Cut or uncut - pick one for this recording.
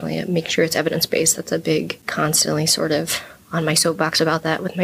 cut